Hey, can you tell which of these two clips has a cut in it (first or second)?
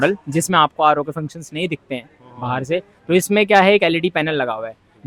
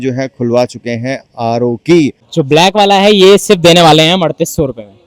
second